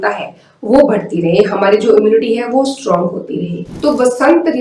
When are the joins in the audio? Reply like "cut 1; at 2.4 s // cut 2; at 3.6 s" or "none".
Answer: cut 1; at 3.6 s